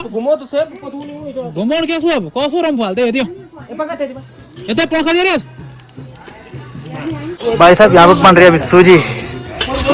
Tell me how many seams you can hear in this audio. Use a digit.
1